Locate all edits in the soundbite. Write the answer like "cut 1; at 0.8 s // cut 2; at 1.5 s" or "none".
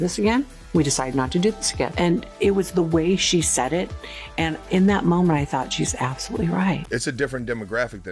cut 1; at 6.8 s